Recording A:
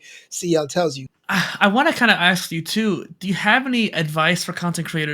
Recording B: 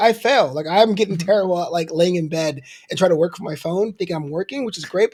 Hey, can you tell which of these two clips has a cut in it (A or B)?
A